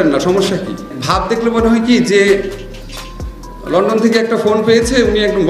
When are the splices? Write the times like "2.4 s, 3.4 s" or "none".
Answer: 0.9 s